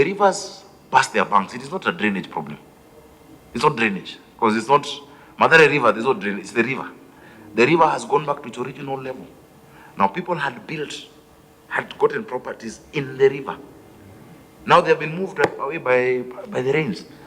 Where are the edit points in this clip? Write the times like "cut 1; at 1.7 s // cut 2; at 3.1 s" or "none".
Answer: none